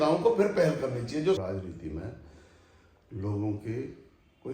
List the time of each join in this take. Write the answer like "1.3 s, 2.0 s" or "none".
1.4 s